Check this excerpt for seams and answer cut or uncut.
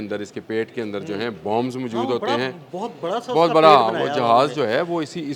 uncut